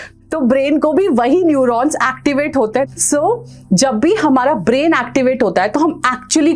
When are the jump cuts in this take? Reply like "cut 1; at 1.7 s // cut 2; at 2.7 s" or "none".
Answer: none